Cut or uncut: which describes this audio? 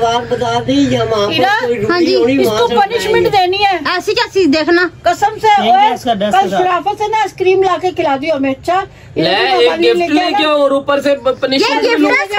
uncut